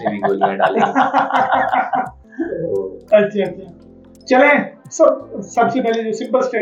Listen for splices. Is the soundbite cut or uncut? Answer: uncut